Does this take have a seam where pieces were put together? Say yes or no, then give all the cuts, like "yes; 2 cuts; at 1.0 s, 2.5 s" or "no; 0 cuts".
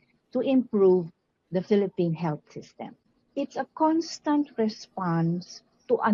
yes; 1 cut; at 3.1 s